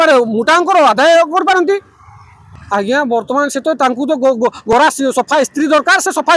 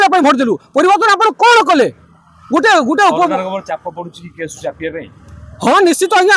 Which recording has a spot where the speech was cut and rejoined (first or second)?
first